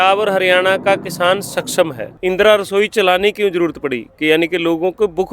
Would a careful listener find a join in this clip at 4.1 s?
no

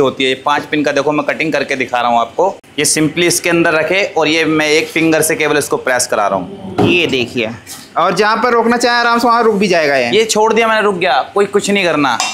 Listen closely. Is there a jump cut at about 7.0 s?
no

